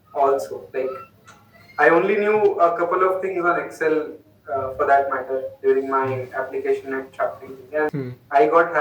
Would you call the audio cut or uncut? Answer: cut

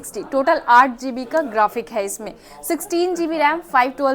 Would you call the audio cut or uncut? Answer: uncut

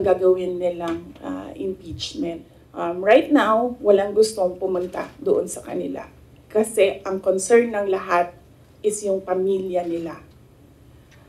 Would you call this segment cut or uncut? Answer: cut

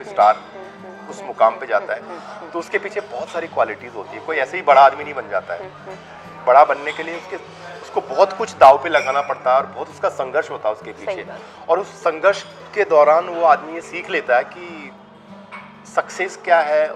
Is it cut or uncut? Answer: uncut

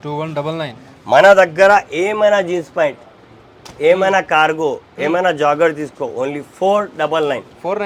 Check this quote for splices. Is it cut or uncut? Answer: uncut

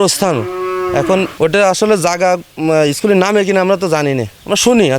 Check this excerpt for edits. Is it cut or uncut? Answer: cut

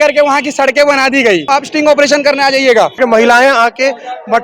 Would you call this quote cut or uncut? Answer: cut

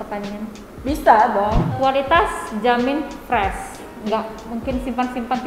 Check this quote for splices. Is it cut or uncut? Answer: cut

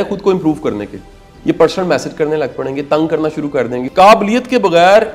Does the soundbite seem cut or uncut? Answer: cut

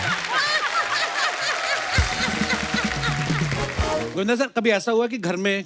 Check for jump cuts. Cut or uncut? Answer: cut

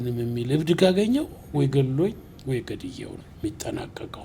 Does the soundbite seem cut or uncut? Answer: cut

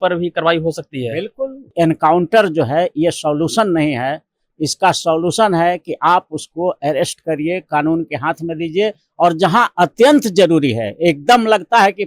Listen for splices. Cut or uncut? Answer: cut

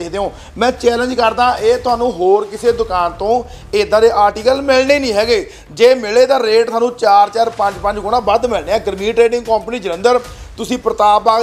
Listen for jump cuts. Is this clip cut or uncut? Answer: uncut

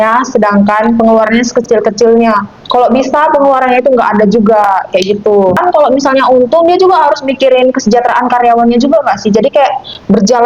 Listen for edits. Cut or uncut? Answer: cut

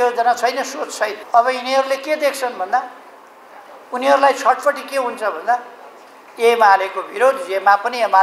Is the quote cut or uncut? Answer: cut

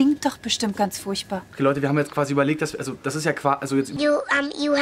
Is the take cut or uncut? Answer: uncut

